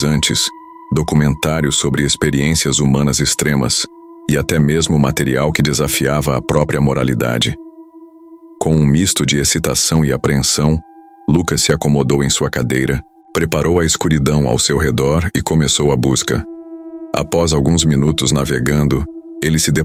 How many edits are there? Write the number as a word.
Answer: zero